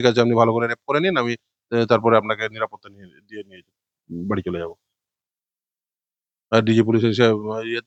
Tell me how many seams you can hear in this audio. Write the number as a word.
zero